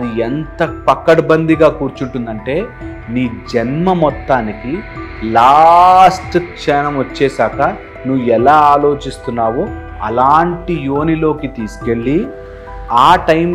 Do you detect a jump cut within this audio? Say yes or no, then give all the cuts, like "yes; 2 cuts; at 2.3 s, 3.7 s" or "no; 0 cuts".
no; 0 cuts